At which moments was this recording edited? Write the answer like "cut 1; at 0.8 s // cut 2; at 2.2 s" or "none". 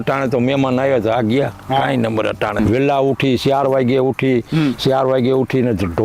cut 1; at 2.6 s